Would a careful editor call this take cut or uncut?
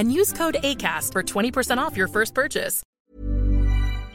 cut